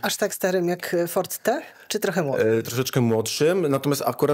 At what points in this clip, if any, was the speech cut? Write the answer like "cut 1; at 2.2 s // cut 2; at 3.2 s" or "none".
cut 1; at 2.7 s